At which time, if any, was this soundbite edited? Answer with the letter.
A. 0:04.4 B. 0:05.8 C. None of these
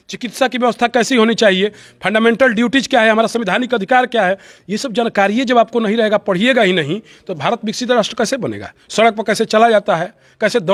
C